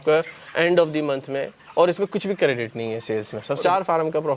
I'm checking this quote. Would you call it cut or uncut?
cut